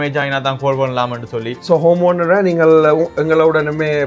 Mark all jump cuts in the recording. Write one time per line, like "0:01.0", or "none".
0:01.5